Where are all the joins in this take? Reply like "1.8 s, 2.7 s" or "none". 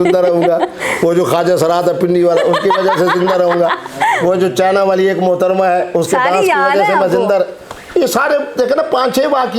none

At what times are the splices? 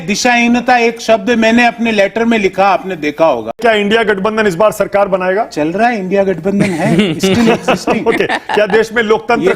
3.6 s

